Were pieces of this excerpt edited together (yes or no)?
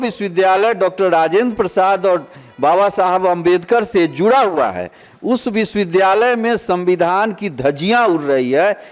no